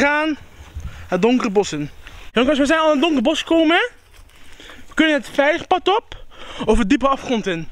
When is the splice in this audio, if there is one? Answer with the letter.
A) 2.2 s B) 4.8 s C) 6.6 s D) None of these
A